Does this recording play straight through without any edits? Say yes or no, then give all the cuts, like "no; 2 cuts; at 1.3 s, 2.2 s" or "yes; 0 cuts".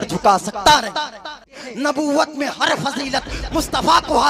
no; 1 cut; at 1.6 s